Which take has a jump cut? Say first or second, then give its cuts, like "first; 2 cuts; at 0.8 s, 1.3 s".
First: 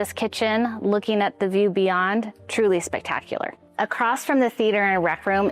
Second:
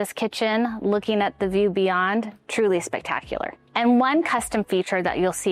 first; 1 cut; at 3.6 s